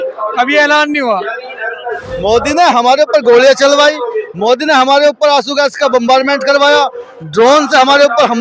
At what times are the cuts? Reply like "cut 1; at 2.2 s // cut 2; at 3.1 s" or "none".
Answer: cut 1; at 2.1 s